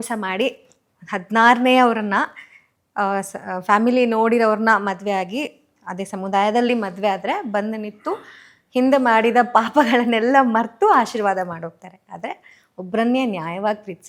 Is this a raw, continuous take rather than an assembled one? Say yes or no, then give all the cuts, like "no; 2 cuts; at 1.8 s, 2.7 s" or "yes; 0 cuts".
yes; 0 cuts